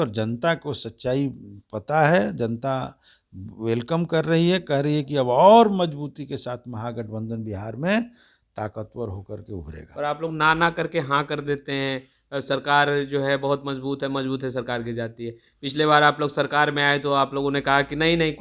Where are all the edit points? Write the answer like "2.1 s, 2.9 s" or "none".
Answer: none